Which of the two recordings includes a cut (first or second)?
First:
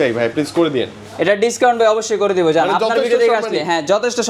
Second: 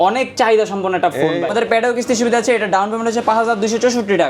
second